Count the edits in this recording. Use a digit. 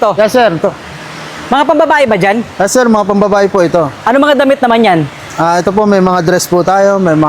0